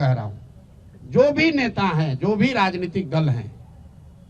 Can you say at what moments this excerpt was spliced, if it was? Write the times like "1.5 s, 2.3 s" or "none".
none